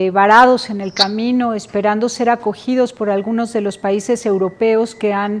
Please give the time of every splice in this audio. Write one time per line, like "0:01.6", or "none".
0:03.5